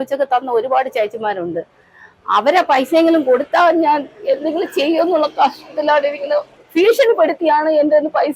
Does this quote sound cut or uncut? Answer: cut